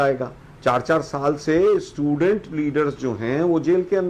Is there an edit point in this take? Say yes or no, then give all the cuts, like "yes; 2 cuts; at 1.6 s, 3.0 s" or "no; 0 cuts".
no; 0 cuts